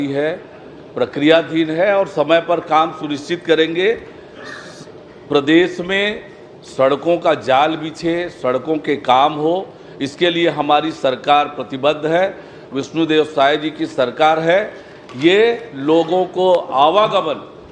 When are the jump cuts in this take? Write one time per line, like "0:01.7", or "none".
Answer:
none